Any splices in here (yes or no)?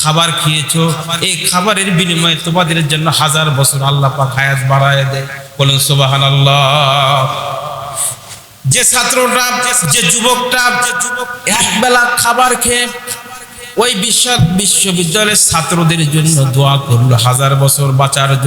yes